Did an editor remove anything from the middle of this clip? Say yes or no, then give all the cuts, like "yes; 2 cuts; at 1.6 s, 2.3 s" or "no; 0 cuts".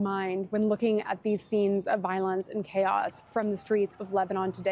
no; 0 cuts